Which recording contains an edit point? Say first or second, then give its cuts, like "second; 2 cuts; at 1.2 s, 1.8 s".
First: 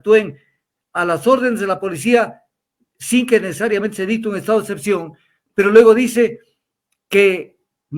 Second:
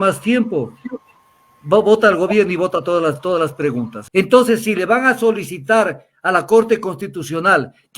second; 1 cut; at 4.0 s